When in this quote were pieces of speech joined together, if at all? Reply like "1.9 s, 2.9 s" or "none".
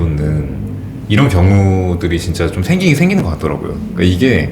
none